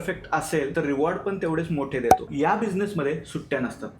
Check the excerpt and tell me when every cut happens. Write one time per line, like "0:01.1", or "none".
0:02.2